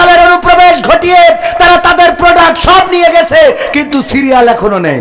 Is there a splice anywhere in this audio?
no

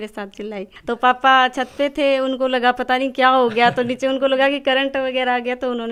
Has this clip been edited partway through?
no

